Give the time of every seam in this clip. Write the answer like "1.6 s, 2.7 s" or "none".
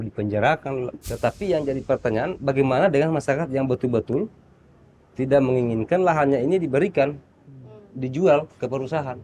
1.0 s